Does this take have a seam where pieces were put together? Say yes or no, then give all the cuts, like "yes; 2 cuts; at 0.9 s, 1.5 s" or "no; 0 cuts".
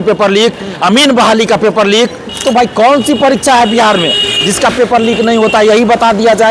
yes; 1 cut; at 2.3 s